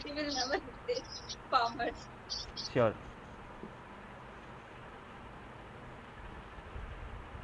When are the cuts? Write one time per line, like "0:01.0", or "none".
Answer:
none